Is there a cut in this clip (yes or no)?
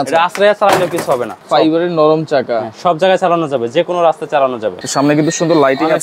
yes